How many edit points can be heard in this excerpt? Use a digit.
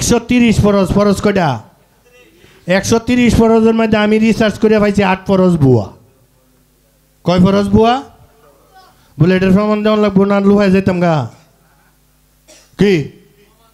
0